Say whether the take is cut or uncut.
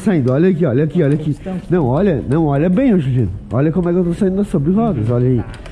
uncut